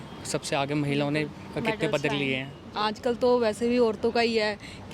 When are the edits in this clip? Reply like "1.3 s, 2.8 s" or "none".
2.6 s